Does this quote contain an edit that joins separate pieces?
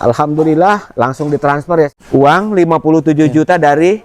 yes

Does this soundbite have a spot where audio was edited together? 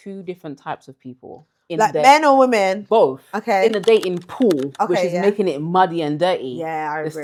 no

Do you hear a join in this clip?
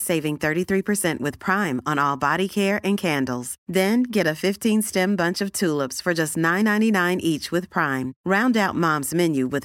no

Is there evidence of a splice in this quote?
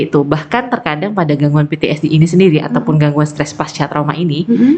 no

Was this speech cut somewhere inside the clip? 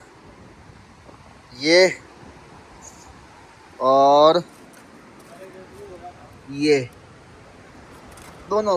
no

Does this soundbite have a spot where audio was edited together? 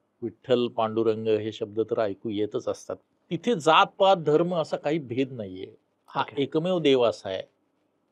yes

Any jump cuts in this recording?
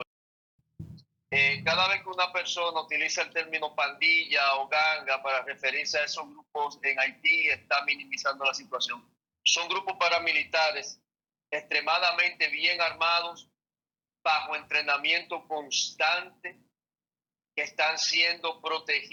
no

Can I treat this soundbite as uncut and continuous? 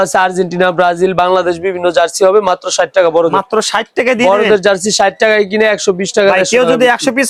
yes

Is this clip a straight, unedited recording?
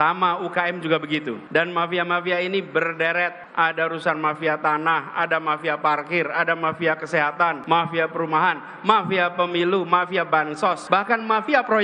no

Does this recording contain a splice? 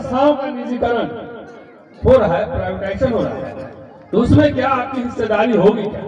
no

